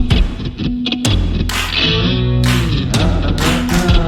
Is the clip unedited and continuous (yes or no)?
yes